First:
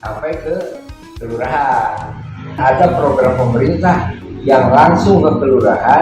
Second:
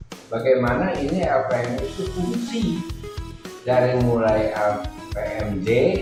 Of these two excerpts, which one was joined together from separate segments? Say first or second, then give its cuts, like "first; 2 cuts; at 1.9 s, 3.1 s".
first; 1 cut; at 2.6 s